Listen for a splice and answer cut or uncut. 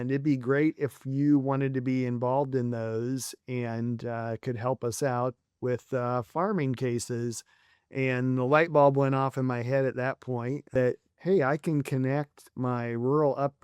cut